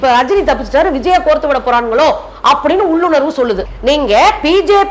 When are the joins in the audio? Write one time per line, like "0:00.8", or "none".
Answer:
0:03.7